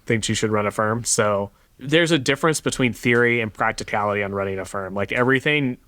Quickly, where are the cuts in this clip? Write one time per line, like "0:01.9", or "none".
0:01.6